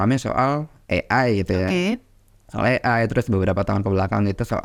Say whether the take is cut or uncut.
uncut